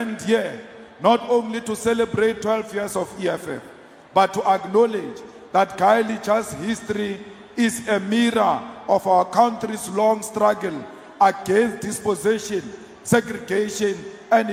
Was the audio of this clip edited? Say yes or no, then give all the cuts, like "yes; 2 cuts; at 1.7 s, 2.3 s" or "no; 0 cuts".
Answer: no; 0 cuts